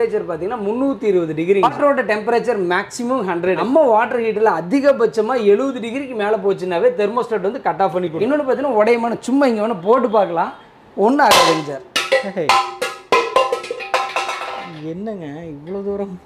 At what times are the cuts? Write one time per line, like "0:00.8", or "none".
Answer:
0:01.7
0:03.6
0:08.1